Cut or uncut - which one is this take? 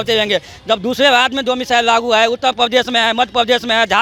uncut